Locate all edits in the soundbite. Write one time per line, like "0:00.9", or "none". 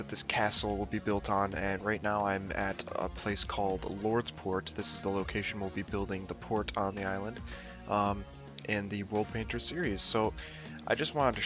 0:08.1

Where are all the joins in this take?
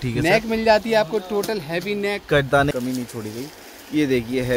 0:02.7

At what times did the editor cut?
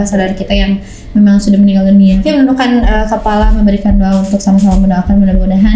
0:02.2

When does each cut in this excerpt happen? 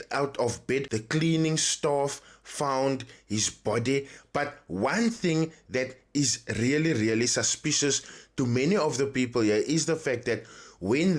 0:00.9

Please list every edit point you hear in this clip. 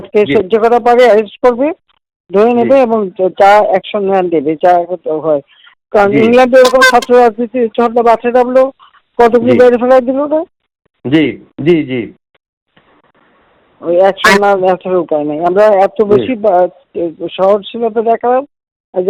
none

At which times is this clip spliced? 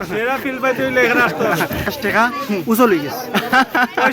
0:01.9

